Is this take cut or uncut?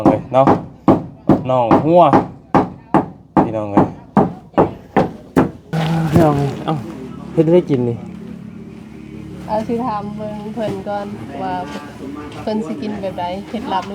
cut